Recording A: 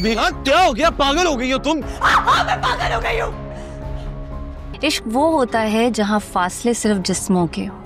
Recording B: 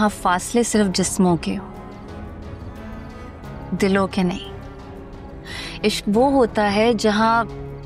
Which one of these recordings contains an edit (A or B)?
A